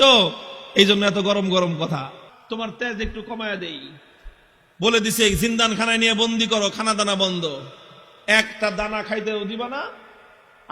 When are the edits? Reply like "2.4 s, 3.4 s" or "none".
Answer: 2.3 s

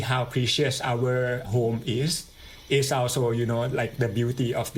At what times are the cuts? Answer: 1.4 s

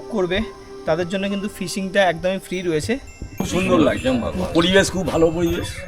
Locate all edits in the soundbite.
3.3 s

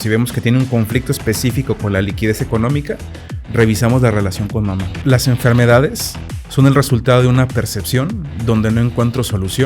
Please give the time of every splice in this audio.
4.9 s

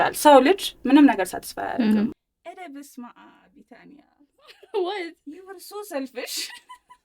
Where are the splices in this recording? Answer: 2.1 s

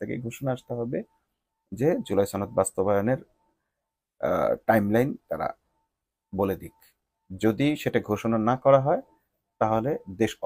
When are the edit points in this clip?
none

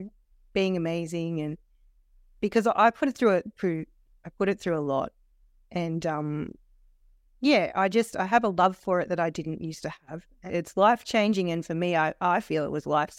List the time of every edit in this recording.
10.4 s

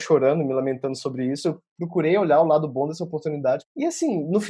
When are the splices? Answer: 1.7 s, 3.7 s

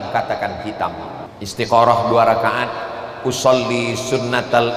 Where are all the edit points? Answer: 1.3 s

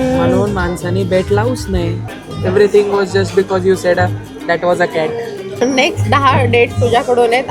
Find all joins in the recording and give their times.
2.0 s, 5.5 s

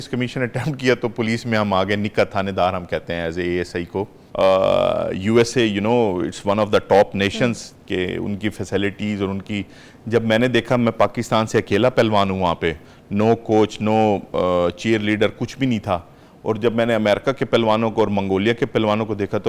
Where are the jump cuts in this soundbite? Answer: 4.2 s

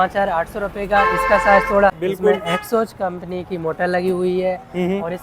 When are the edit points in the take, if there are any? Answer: 2.0 s

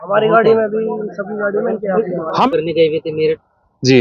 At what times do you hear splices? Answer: 2.5 s

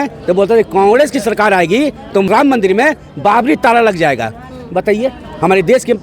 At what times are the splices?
2.3 s

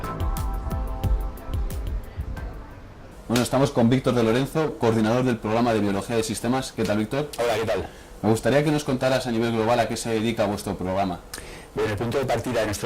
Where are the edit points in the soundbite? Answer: 3.5 s

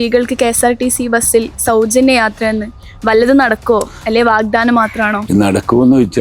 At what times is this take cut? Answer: 5.2 s

